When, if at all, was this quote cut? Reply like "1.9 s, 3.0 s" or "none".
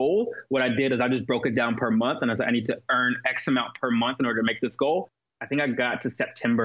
5.1 s